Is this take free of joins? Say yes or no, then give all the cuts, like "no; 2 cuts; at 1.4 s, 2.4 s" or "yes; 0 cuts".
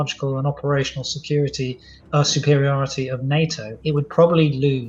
no; 1 cut; at 3.7 s